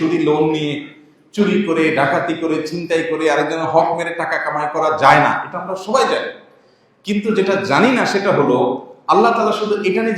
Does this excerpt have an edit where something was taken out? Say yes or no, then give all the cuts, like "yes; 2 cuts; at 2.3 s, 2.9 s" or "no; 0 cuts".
no; 0 cuts